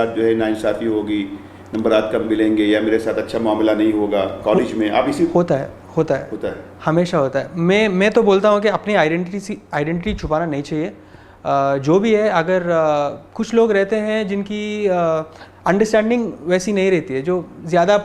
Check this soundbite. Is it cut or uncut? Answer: uncut